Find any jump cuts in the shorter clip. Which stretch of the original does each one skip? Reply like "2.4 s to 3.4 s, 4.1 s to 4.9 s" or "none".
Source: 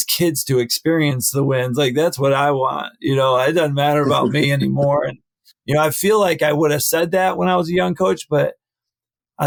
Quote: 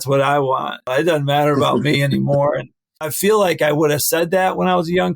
3.0 s to 3.4 s, 5.6 s to 5.9 s